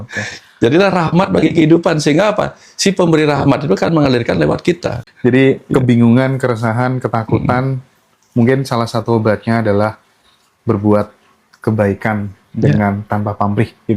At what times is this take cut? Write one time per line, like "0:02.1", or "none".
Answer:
0:05.1

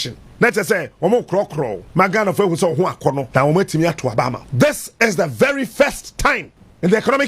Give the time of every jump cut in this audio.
0:01.8
0:03.2
0:04.4

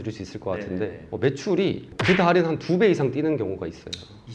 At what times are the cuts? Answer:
none

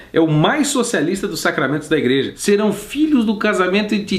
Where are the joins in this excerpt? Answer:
0:02.3

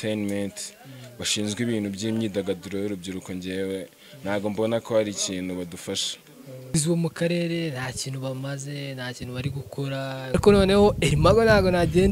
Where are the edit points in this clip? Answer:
0:06.6
0:10.3

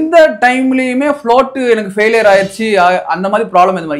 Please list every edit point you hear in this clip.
none

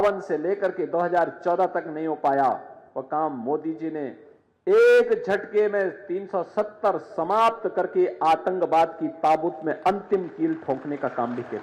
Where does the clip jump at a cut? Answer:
none

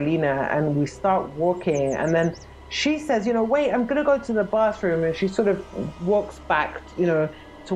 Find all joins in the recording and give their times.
none

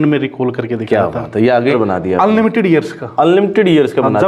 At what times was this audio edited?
0:01.7

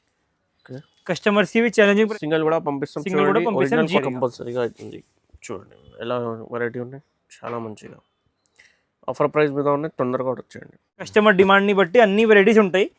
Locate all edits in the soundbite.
0:02.1
0:04.0
0:11.1

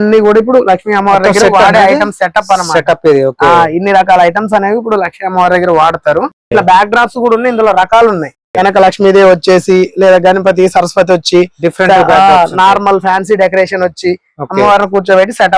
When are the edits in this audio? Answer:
none

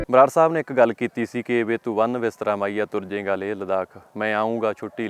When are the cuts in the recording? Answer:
none

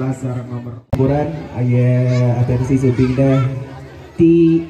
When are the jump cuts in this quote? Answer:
0:01.0

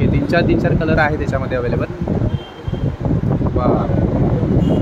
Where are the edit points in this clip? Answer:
0:01.9

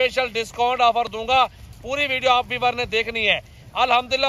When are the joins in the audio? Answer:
none

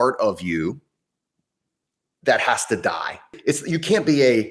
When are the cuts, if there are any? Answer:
0:03.3

